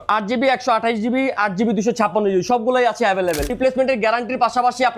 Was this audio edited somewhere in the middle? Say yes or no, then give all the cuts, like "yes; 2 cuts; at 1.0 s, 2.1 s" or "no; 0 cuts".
yes; 1 cut; at 3.5 s